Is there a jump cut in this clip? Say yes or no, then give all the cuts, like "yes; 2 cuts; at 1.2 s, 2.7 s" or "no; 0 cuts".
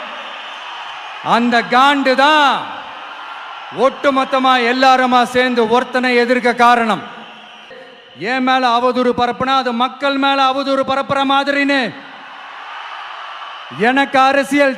yes; 1 cut; at 7.8 s